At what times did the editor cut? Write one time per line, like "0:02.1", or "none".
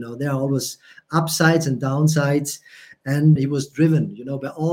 0:03.4